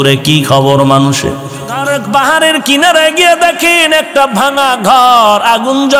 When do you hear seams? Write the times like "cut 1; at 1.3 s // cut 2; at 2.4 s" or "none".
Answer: cut 1; at 1.8 s